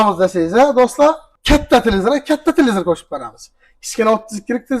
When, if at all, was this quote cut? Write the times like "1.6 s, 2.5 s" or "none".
1.3 s